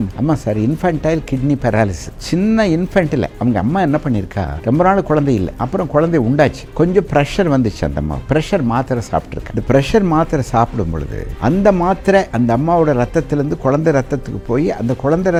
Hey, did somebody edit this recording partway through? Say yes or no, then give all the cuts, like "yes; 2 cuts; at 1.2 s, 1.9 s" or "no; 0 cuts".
no; 0 cuts